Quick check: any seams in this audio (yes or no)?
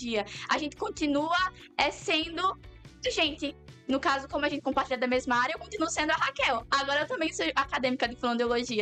no